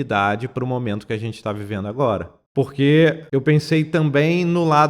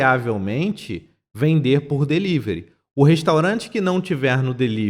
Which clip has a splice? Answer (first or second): first